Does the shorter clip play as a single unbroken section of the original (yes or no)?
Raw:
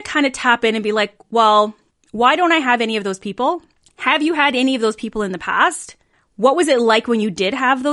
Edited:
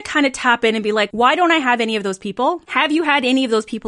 no